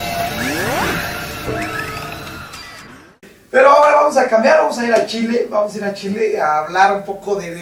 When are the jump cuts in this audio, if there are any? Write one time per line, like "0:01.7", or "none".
none